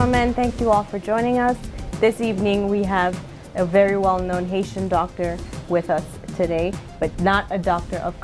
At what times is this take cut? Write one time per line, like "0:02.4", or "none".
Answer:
none